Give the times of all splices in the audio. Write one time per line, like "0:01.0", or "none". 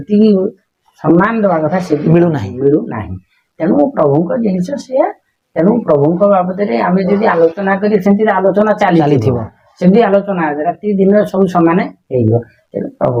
none